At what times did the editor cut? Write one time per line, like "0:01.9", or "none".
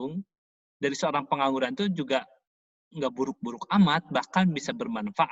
none